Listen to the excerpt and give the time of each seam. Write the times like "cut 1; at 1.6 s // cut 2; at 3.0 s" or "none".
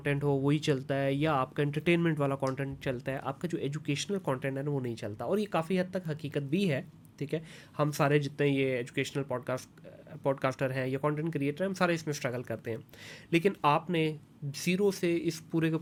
none